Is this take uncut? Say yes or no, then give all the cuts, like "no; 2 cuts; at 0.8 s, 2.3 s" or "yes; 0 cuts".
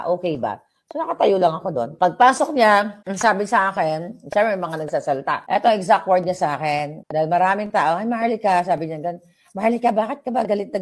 no; 4 cuts; at 1.9 s, 3.0 s, 5.4 s, 7.0 s